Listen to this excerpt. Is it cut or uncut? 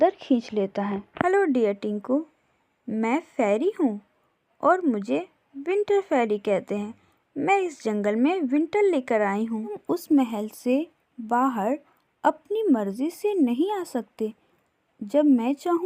cut